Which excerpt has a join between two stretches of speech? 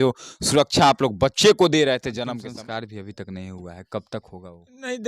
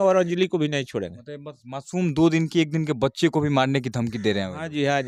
first; 1 cut; at 2.2 s

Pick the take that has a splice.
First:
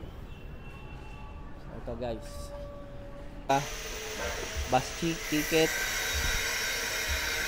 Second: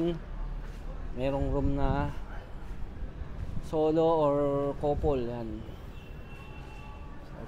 first; 1 cut; at 3.5 s

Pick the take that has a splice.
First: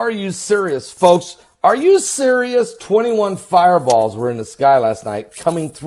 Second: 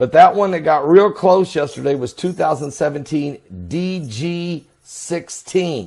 second; 1 cut; at 3.6 s

